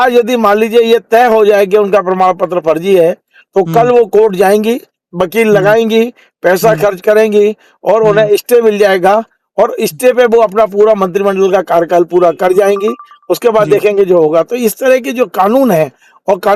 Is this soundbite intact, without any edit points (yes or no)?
yes